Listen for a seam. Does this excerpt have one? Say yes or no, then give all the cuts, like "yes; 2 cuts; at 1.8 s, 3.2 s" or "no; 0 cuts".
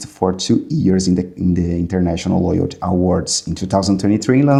no; 0 cuts